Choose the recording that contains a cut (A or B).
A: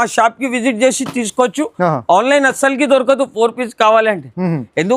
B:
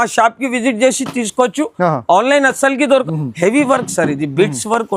B